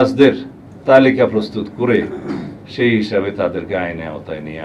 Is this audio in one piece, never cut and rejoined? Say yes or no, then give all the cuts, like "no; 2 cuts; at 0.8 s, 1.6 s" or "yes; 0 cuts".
yes; 0 cuts